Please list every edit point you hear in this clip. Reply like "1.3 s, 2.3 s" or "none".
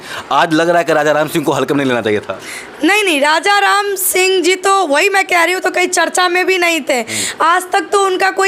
none